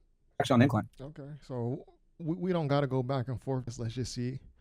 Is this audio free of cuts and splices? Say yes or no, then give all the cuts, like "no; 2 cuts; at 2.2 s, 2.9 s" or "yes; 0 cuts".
no; 1 cut; at 3.7 s